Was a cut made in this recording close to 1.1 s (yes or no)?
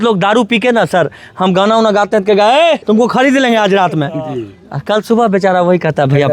no